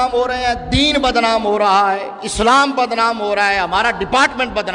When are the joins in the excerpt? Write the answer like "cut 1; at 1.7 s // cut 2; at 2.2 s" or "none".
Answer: none